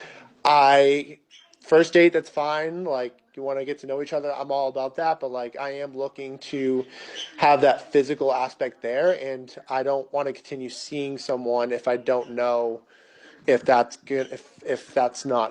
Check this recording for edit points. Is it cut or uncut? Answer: uncut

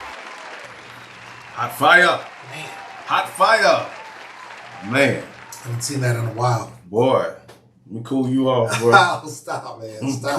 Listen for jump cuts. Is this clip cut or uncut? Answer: uncut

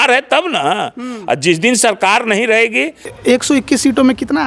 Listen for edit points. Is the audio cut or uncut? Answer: cut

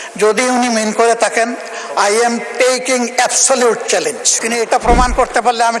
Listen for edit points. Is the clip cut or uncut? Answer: cut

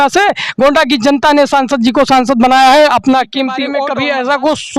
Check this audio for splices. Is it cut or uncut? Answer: cut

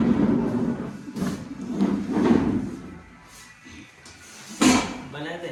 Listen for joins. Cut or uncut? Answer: uncut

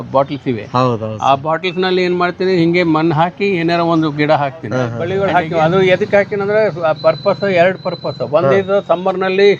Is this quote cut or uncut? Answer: cut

